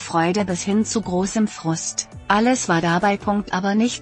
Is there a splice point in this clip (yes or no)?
no